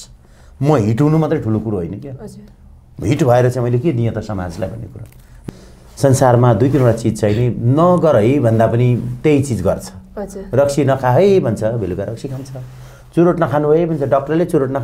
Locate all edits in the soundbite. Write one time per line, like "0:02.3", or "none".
0:05.3